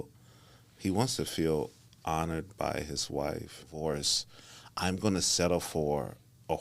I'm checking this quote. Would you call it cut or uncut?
cut